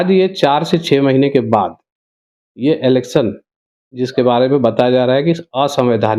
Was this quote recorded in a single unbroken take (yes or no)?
yes